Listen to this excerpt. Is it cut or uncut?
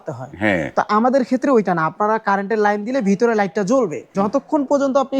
cut